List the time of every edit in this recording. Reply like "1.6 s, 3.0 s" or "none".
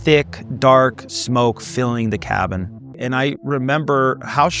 none

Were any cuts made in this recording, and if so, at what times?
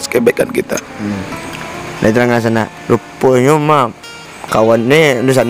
none

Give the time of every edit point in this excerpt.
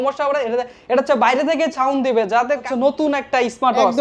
2.6 s

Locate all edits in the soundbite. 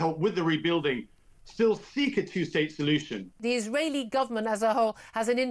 3.4 s

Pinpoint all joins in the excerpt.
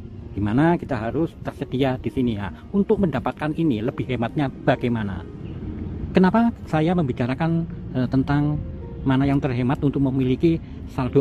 none

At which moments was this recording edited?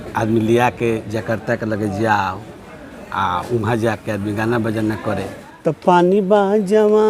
5.4 s

